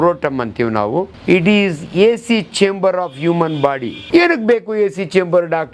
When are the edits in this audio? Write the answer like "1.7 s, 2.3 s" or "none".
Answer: 1.1 s, 3.9 s